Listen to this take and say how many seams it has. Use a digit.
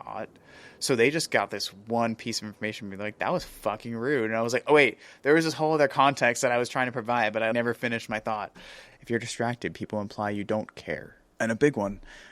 2